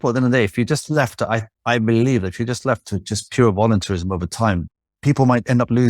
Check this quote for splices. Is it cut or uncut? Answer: cut